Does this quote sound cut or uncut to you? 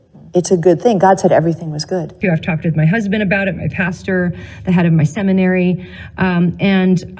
cut